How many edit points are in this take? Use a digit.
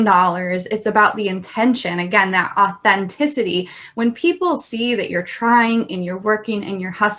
0